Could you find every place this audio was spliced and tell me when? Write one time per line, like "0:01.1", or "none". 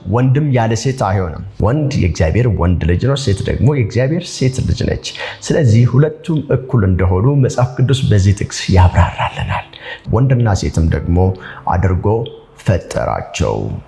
0:01.5
0:09.9